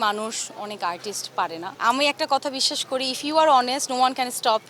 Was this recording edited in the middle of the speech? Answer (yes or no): yes